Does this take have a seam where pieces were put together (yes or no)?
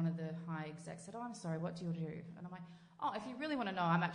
no